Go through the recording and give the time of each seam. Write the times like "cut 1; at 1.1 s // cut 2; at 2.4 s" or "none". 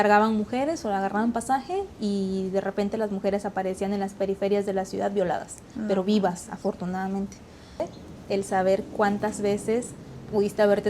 cut 1; at 7.8 s

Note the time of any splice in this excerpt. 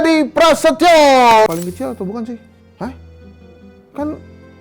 cut 1; at 1.5 s

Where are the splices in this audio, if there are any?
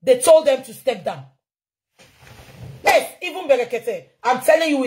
cut 1; at 2.8 s

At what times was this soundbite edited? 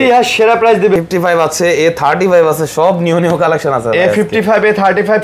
cut 1; at 1.0 s

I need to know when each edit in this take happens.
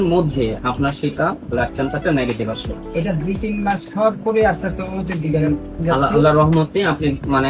none

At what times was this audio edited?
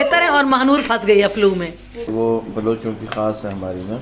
cut 1; at 2.0 s

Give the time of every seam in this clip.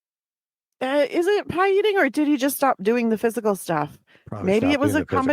none

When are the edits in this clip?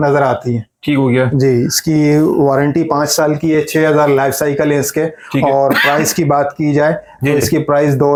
none

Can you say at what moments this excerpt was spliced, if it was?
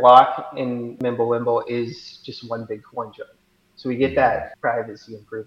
cut 1; at 0.9 s // cut 2; at 4.5 s

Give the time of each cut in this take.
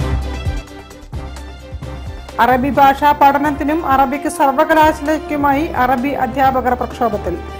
none

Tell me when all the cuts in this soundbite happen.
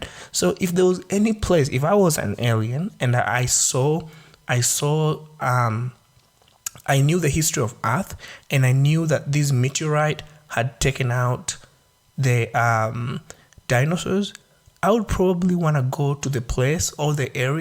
none

